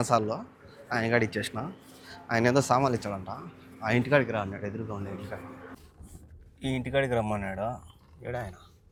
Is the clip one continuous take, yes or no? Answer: yes